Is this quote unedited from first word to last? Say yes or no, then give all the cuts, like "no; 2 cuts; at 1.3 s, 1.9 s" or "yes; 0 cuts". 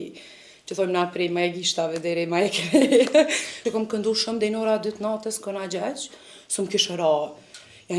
no; 1 cut; at 3.5 s